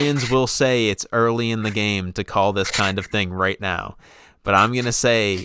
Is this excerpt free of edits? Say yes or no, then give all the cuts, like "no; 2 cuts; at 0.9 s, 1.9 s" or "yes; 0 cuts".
yes; 0 cuts